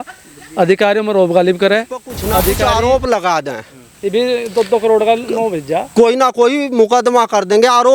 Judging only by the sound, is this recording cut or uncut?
cut